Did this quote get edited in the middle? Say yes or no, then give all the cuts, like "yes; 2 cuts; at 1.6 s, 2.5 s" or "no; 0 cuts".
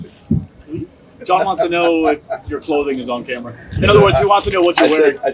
yes; 1 cut; at 2.5 s